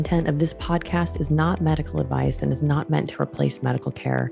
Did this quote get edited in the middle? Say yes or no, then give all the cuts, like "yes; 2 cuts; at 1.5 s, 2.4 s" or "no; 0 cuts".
no; 0 cuts